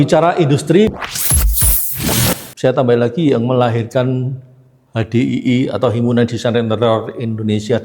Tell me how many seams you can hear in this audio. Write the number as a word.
two